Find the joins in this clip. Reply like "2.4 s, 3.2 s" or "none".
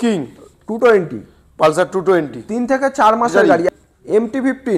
3.7 s